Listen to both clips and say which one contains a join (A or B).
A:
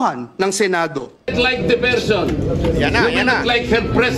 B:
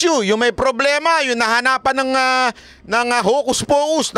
A